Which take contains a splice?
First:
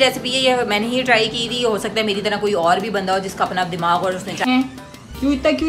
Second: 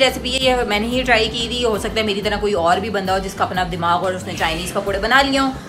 first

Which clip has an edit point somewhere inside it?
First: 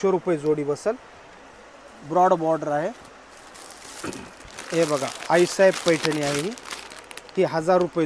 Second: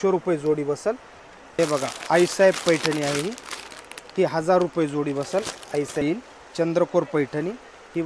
second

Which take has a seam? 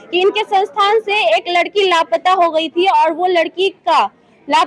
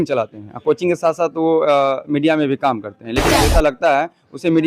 second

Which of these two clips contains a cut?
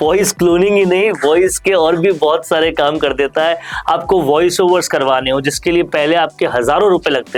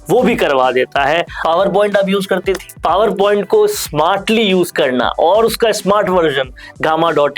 second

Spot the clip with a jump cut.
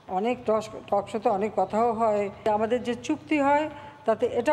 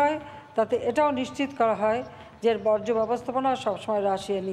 first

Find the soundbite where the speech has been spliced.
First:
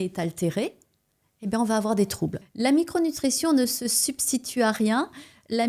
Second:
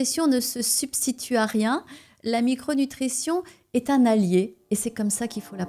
first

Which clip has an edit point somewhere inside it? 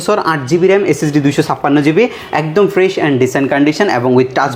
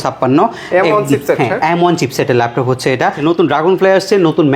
second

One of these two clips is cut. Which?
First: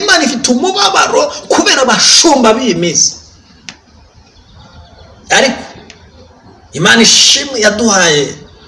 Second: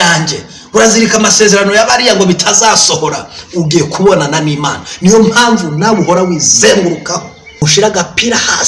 second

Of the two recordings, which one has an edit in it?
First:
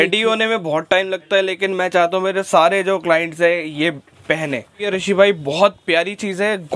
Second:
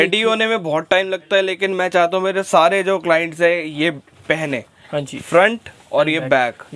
first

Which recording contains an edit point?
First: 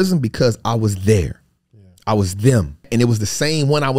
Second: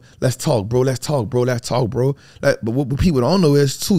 first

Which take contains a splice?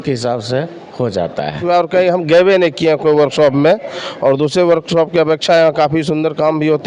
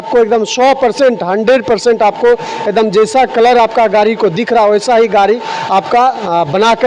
first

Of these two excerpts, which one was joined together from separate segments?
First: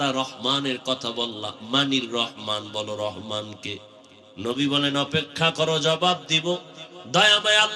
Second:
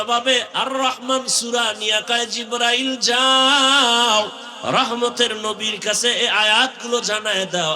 second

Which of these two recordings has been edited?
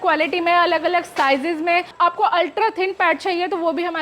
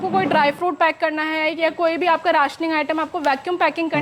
first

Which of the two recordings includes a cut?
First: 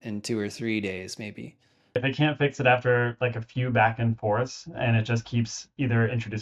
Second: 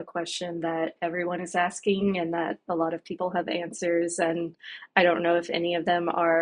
first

